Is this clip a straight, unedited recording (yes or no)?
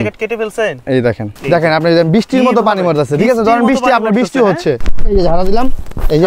no